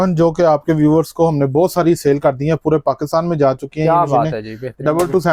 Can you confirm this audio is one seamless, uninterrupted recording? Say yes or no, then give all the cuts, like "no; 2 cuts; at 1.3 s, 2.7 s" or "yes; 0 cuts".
yes; 0 cuts